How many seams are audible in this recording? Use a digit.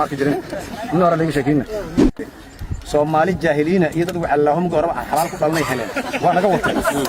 1